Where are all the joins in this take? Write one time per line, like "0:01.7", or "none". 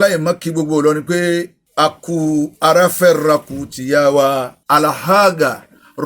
0:01.6
0:04.6